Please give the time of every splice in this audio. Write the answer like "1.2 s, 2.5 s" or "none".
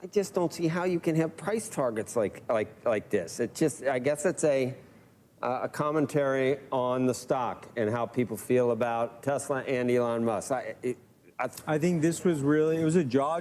11.5 s